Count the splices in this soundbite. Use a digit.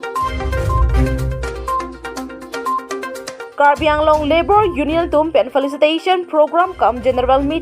1